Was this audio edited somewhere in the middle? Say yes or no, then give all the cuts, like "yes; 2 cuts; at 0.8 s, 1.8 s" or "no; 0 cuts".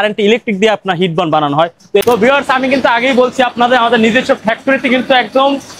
yes; 1 cut; at 2.0 s